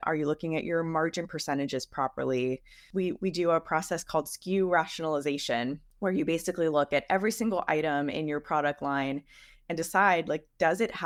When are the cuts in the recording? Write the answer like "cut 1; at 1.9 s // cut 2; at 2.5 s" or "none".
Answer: none